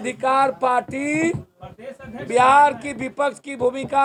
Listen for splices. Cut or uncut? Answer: uncut